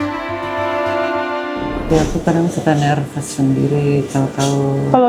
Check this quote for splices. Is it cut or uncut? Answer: cut